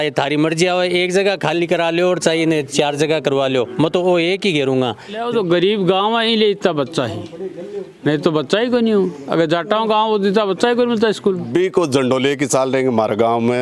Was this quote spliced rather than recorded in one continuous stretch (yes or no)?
yes